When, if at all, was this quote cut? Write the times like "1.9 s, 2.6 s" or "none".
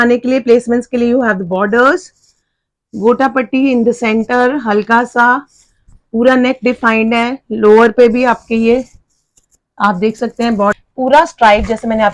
10.8 s